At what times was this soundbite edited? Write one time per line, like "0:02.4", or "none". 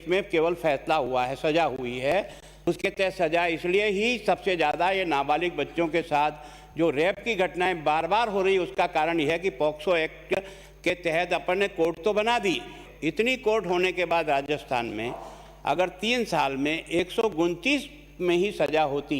0:02.5
0:12.9